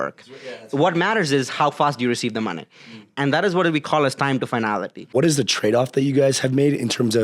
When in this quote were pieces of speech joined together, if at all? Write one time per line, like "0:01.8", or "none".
0:05.1